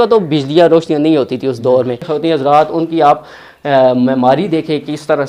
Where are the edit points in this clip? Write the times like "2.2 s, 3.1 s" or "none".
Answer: 2.1 s

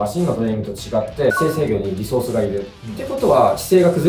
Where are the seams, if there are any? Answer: 1.3 s

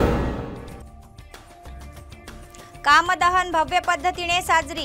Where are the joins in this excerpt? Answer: 2.8 s

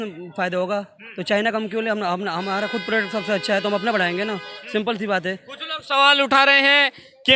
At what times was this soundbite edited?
none

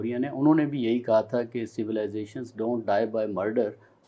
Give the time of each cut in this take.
none

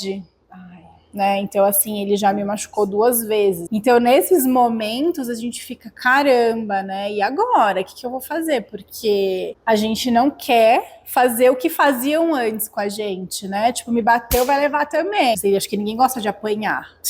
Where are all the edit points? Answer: 3.6 s, 9.5 s, 15.4 s

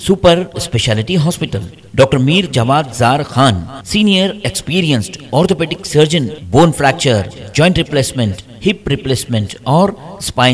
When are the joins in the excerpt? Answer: none

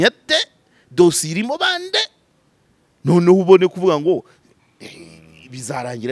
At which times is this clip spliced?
none

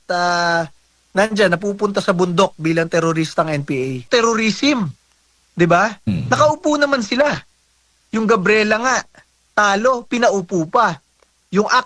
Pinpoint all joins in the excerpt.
4.1 s

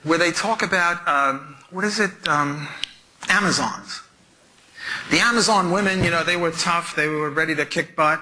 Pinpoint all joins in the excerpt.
none

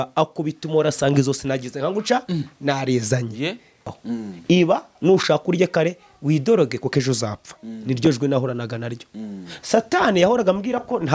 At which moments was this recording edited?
3.8 s

